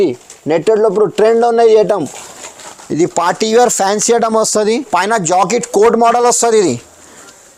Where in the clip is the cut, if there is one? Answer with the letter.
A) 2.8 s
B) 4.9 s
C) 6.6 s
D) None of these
D